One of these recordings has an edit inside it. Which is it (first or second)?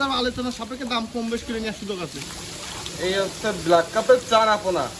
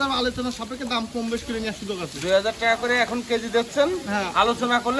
first